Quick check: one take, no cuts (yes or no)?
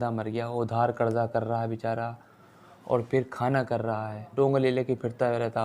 no